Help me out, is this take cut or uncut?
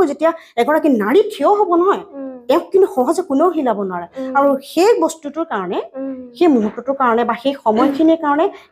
uncut